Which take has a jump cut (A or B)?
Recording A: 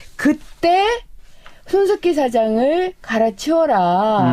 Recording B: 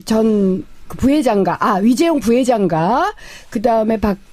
B